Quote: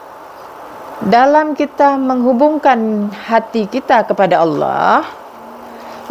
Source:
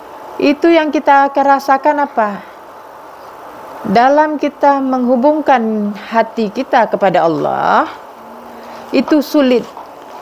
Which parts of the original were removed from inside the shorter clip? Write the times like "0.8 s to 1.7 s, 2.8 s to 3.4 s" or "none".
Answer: none